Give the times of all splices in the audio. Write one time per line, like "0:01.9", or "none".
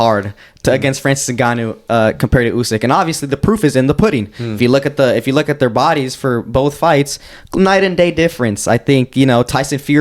none